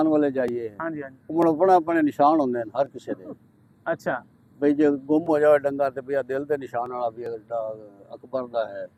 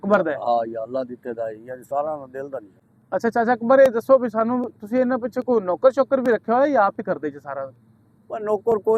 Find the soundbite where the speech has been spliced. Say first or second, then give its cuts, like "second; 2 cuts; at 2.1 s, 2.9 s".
second; 1 cut; at 2.8 s